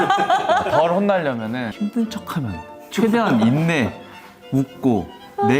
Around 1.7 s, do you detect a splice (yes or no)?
yes